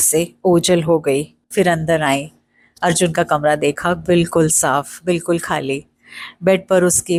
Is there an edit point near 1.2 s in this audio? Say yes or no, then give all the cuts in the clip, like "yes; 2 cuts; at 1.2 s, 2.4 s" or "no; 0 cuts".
no; 0 cuts